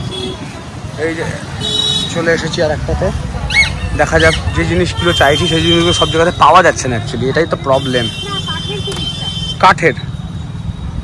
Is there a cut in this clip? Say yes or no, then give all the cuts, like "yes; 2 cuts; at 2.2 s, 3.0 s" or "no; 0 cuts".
no; 0 cuts